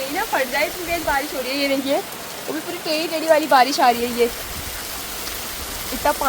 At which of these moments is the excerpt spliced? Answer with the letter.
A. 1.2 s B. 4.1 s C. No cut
C